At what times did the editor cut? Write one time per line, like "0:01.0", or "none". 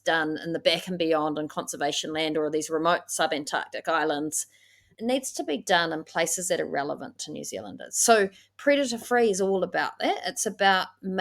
0:04.9